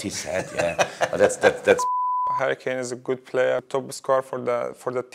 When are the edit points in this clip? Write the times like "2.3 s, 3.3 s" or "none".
2.3 s, 3.6 s